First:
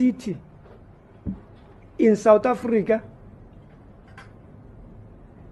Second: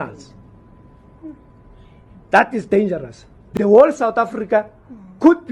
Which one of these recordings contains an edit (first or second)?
second